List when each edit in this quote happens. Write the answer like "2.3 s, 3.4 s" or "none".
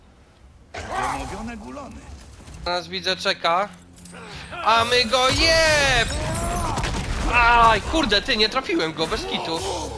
2.7 s